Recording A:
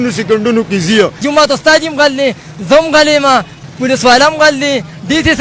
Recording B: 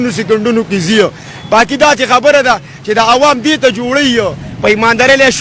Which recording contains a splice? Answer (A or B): A